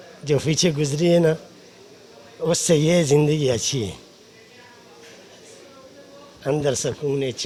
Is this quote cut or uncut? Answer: uncut